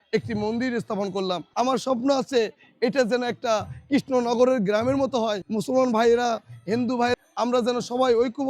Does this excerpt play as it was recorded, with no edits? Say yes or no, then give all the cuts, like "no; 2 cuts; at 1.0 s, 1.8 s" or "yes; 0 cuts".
no; 3 cuts; at 1.5 s, 5.5 s, 7.1 s